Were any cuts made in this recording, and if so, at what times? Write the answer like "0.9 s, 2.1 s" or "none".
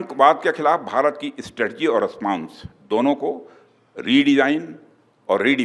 none